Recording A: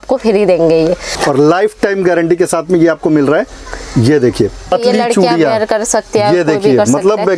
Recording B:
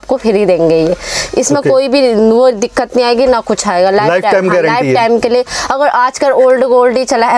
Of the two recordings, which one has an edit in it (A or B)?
A